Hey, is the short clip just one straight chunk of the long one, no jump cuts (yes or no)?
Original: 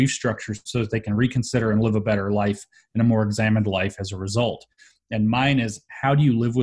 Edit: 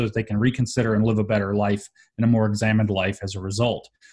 yes